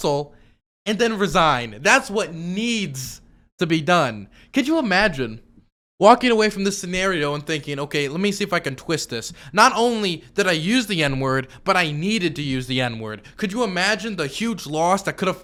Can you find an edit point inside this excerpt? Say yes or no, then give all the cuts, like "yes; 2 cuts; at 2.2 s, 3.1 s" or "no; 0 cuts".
no; 0 cuts